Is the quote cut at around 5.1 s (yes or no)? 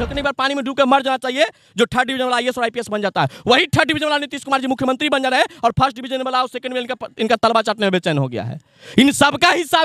no